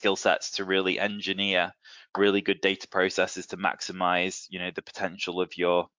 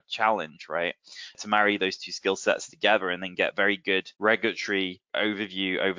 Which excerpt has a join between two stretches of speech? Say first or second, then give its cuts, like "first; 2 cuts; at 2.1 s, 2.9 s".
second; 3 cuts; at 1.4 s, 4.1 s, 5.1 s